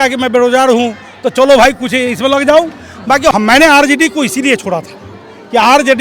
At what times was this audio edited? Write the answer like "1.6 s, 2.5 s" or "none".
3.3 s